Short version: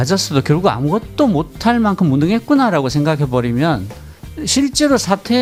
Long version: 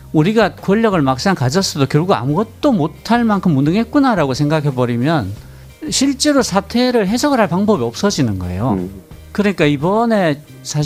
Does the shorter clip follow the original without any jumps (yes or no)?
yes